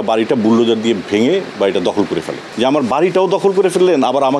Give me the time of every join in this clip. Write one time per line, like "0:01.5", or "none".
0:02.4